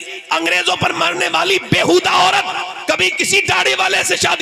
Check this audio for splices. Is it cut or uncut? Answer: uncut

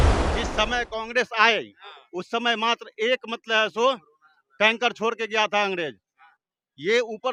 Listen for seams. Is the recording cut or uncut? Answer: uncut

